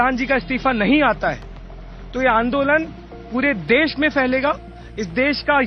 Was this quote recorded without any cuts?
yes; 0 cuts

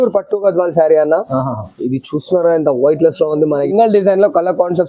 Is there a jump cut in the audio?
yes; 1 cut; at 3.7 s

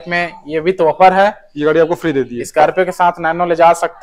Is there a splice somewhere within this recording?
no; 0 cuts

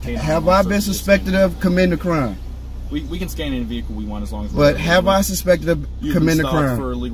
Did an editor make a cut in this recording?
yes; 2 cuts; at 4.3 s, 5.9 s

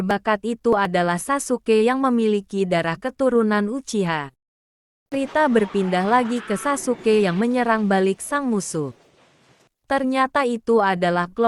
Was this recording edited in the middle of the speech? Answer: yes; 1 cut; at 5.1 s

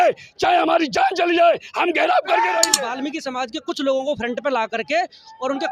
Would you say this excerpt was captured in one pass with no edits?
no; 1 cut; at 2.7 s

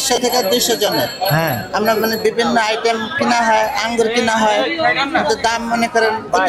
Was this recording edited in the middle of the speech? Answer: no; 0 cuts

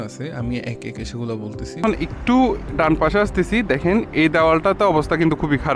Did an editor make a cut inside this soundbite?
yes; 1 cut; at 1.8 s

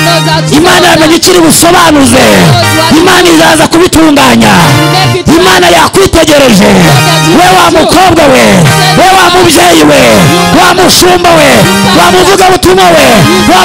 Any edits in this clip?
no; 0 cuts

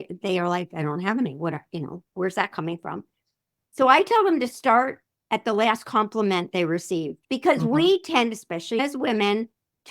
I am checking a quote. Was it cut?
yes; 2 cuts; at 7.2 s, 8.8 s

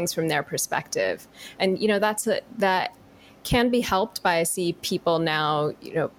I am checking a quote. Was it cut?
no; 0 cuts

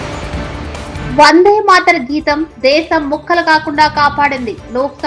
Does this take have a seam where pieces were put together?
yes; 1 cut; at 1.0 s

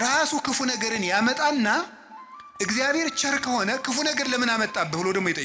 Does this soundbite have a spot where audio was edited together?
no; 0 cuts

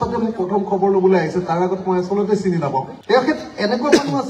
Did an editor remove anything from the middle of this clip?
no; 0 cuts

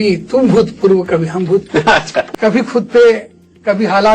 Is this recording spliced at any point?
yes; 1 cut; at 2.3 s

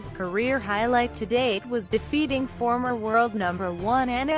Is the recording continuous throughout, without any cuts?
no; 1 cut; at 2.5 s

